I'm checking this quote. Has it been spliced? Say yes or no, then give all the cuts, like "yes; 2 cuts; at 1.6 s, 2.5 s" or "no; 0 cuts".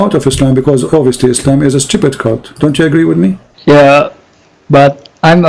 yes; 1 cut; at 3.5 s